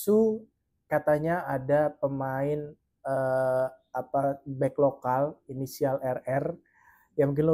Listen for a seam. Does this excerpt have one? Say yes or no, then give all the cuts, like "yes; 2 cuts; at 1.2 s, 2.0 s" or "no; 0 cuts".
no; 0 cuts